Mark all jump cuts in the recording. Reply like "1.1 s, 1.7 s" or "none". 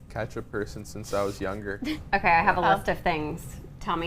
2.0 s

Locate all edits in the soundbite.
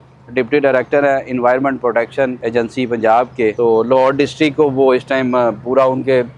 2.4 s, 3.6 s

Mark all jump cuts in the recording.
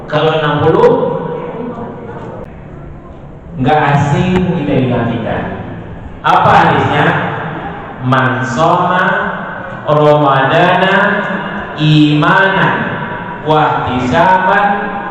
2.4 s

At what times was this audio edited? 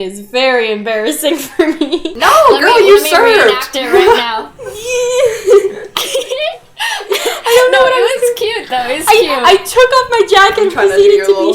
2.1 s

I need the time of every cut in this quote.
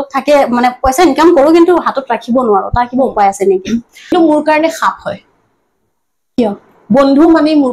4.1 s

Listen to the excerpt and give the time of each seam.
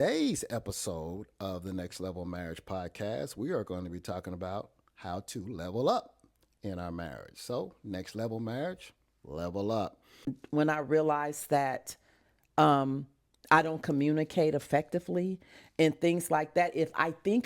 10.3 s

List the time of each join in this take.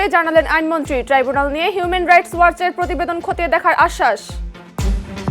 4.4 s

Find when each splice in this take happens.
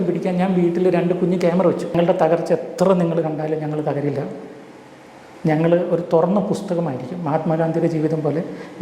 1.9 s

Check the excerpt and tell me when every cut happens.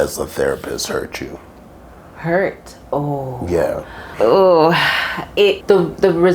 4.0 s, 5.6 s

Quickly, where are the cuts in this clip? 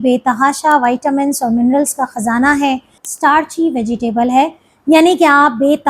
3.0 s

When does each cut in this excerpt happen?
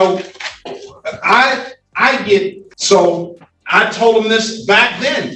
2.7 s

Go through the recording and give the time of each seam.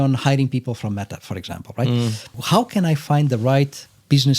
2.3 s

